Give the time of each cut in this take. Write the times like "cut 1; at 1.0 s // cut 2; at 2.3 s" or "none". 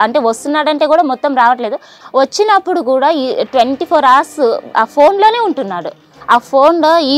cut 1; at 2.0 s // cut 2; at 6.1 s